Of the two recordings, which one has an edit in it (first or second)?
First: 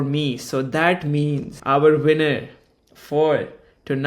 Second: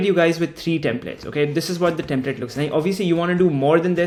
first